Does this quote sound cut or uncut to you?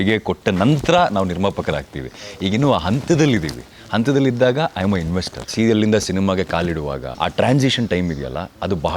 cut